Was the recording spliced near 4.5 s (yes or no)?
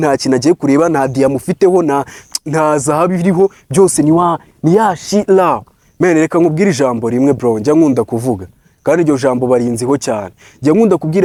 no